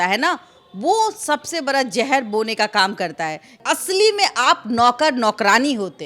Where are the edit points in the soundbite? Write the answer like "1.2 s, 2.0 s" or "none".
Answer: 3.5 s